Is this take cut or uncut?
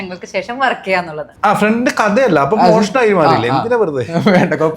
cut